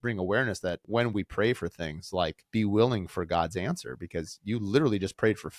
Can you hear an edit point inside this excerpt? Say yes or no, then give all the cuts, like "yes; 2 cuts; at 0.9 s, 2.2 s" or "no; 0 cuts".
yes; 2 cuts; at 0.8 s, 2.4 s